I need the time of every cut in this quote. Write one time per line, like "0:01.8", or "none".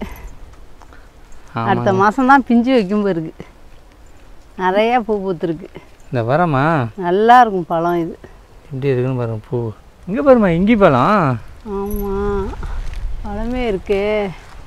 0:10.0